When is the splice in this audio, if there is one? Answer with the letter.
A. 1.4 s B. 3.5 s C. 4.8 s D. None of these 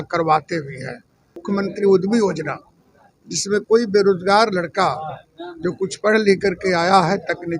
A